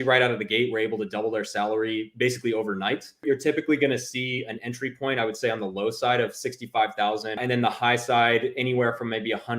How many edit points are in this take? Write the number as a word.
two